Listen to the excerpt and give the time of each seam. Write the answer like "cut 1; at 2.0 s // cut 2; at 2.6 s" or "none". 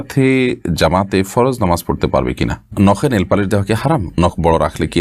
cut 1; at 2.6 s // cut 2; at 4.1 s